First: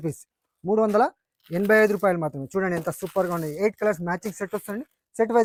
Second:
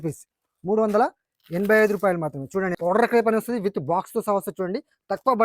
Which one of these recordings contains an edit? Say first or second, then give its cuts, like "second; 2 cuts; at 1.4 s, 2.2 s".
second; 1 cut; at 2.7 s